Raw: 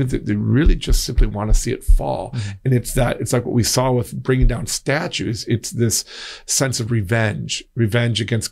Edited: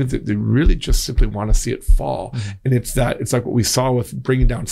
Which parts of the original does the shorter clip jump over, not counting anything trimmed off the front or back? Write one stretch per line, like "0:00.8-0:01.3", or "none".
none